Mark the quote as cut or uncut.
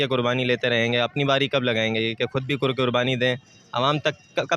uncut